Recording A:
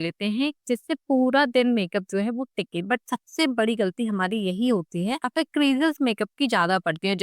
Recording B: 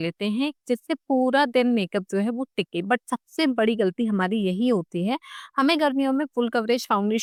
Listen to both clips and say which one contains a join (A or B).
A